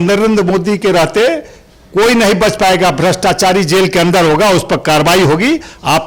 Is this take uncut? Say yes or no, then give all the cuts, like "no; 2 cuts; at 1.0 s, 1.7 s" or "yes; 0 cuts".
yes; 0 cuts